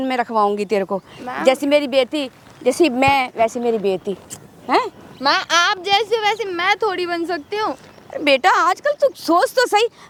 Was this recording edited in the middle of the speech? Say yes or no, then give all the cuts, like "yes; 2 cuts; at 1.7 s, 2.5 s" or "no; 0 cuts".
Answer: no; 0 cuts